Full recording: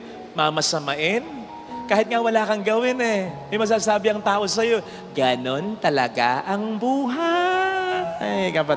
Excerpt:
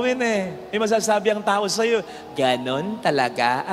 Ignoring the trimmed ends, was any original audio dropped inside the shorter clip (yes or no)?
no